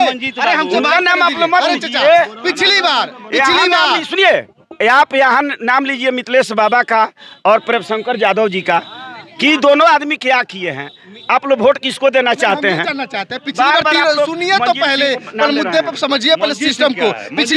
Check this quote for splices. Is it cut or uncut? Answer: uncut